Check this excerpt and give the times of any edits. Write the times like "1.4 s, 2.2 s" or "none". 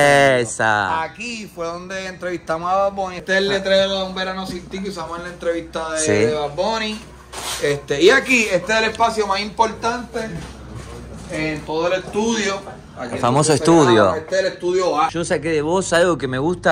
3.2 s, 15.1 s